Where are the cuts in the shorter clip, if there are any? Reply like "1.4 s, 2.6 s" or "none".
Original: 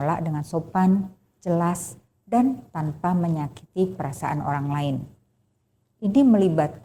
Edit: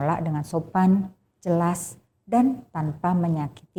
none